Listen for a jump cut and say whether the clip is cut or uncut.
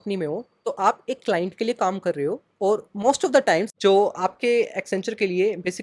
cut